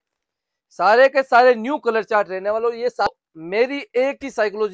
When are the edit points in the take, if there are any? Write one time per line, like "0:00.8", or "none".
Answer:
0:03.1